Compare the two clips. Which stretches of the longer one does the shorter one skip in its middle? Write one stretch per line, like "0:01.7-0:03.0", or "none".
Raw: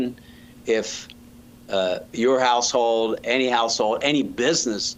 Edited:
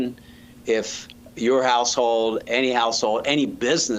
0:01.3-0:02.1